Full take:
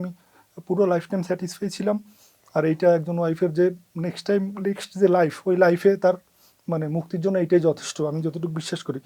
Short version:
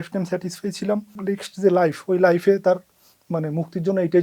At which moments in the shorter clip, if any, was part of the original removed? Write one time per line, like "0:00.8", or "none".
0:01.2